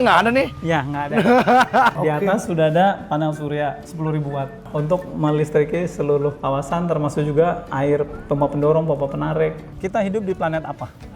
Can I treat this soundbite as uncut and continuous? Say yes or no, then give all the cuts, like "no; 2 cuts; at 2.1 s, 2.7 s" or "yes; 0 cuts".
no; 3 cuts; at 1.9 s, 4.4 s, 9.7 s